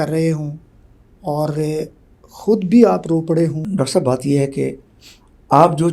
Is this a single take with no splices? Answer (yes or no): no